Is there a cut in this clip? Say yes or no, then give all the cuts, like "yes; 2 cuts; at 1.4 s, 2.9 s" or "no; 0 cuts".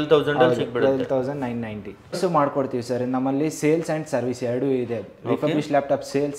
yes; 1 cut; at 2.1 s